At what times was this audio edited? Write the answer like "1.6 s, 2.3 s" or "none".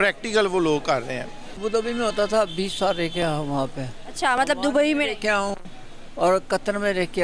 1.4 s